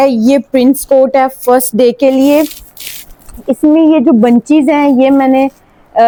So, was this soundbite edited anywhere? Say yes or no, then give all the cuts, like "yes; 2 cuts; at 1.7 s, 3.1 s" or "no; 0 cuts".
no; 0 cuts